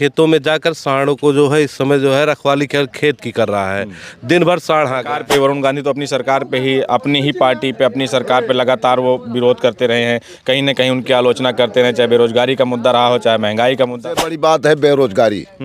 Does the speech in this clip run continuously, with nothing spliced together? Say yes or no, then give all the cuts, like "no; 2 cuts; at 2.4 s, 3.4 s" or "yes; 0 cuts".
no; 2 cuts; at 5.1 s, 14.0 s